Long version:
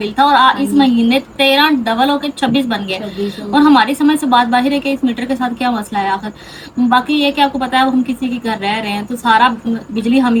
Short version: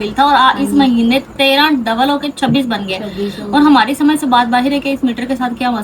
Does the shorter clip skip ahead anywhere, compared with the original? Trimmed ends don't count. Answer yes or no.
no